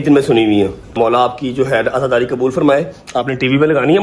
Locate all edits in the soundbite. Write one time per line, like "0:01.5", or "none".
0:00.9